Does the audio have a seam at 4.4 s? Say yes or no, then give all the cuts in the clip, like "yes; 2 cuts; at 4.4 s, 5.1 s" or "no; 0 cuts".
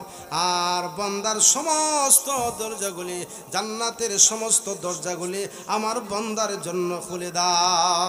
no; 0 cuts